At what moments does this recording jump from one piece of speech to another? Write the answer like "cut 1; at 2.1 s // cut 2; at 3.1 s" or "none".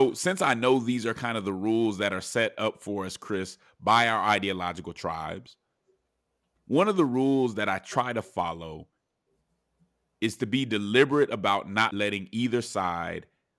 cut 1; at 11.9 s